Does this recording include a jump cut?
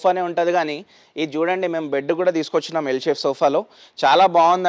no; 0 cuts

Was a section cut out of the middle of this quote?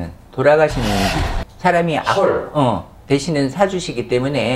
no; 0 cuts

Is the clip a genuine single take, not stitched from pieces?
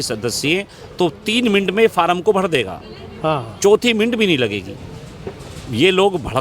yes; 0 cuts

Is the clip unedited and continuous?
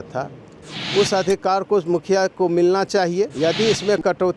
no; 1 cut; at 3.3 s

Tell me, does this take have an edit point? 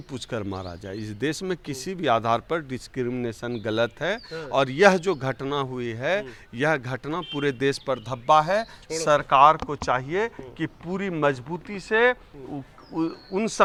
no; 0 cuts

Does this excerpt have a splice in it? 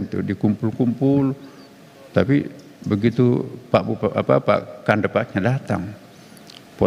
no; 0 cuts

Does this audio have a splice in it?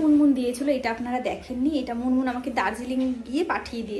no; 0 cuts

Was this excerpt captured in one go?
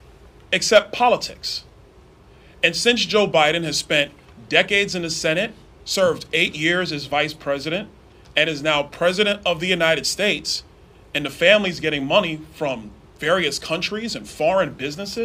yes; 0 cuts

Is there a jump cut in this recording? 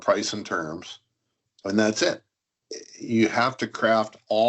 no; 0 cuts

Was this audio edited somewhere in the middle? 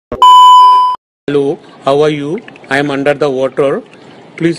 yes; 1 cut; at 1.1 s

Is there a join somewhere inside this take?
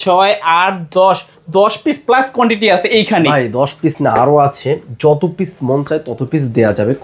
no; 0 cuts

